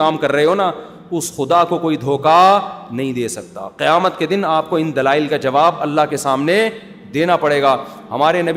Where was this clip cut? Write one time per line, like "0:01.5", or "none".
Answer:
none